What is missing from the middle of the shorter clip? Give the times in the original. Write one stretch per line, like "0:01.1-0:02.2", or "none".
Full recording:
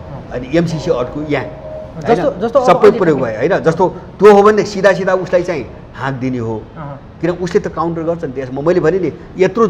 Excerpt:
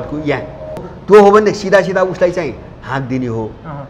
0:01.9-0:04.0